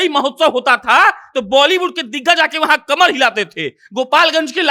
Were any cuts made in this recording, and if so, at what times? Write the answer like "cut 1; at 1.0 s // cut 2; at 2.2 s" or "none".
none